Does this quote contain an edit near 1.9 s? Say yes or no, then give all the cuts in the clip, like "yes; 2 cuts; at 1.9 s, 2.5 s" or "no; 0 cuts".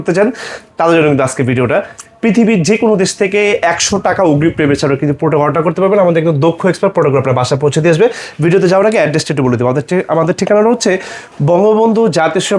no; 0 cuts